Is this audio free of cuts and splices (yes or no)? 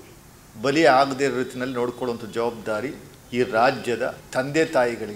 no